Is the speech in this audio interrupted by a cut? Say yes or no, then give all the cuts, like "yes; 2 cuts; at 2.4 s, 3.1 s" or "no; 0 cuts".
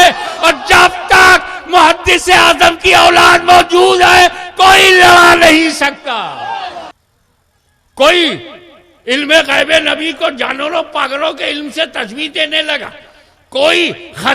yes; 1 cut; at 6.9 s